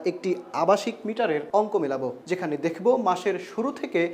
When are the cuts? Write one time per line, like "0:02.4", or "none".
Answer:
0:01.5
0:02.2